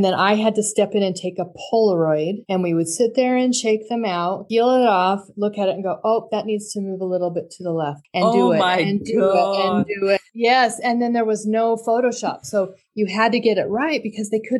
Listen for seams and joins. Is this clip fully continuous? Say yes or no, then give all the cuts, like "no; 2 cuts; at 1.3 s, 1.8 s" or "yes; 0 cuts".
yes; 0 cuts